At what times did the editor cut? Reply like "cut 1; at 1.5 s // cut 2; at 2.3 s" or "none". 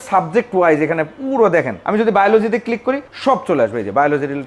cut 1; at 1.8 s // cut 2; at 3.1 s